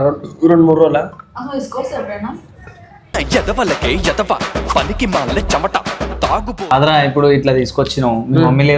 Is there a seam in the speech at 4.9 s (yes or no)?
no